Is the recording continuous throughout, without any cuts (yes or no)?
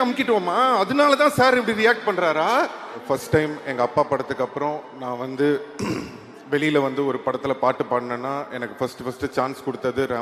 no